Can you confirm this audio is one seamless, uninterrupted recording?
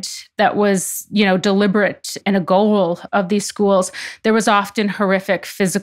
yes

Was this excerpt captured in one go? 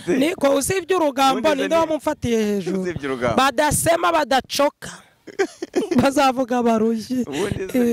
yes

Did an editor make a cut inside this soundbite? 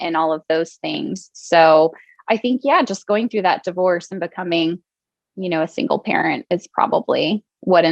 no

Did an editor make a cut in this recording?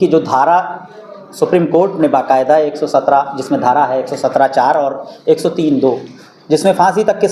no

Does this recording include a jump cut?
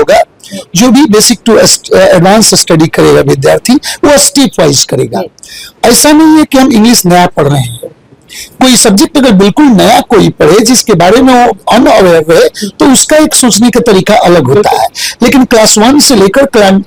no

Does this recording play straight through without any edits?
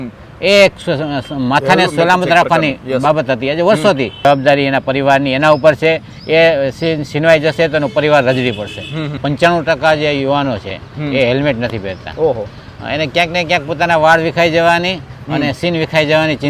no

